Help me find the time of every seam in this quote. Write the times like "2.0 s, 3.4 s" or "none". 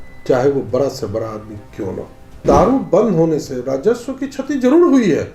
2.4 s

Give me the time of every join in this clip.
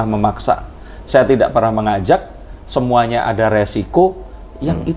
none

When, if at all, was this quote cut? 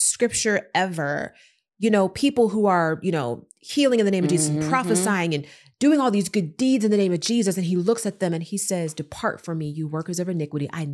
none

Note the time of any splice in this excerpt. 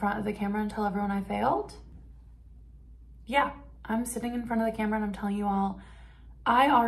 1.9 s

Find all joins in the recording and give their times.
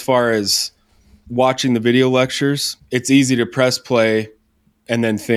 2.7 s

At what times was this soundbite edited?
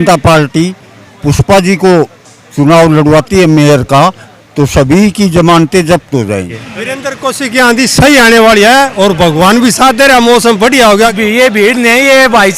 6.7 s, 11.1 s

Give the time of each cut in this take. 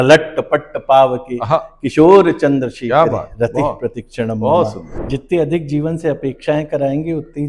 4.9 s

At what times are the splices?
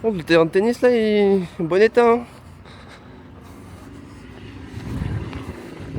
none

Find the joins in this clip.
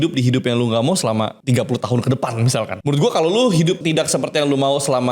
1.4 s, 2.8 s, 3.8 s

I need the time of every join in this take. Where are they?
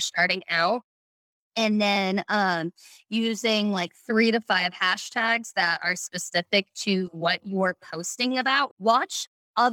8.7 s

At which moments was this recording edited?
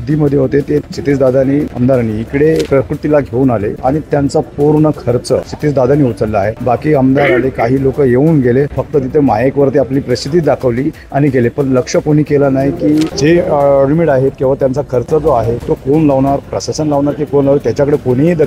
none

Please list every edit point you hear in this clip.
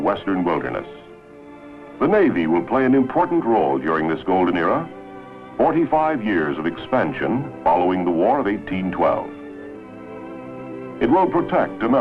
9.9 s

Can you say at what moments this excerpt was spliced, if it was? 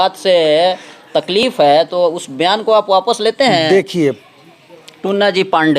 4.0 s

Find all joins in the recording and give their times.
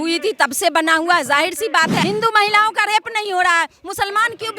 2.0 s

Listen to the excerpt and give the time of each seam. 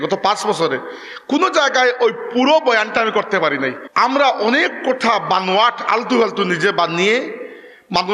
3.8 s

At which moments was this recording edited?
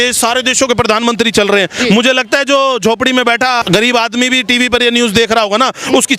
3.6 s

